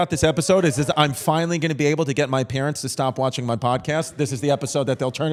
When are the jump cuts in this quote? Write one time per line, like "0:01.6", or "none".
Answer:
none